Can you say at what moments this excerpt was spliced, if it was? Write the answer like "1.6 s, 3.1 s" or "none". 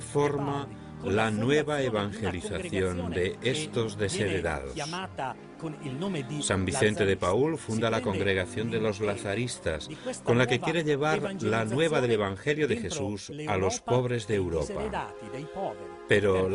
9.9 s